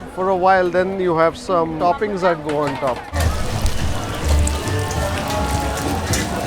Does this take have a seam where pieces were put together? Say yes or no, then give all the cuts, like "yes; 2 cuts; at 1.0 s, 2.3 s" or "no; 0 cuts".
yes; 1 cut; at 3.1 s